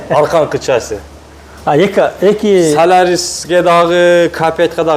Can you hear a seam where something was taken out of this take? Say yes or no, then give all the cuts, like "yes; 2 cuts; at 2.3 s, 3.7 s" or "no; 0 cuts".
no; 0 cuts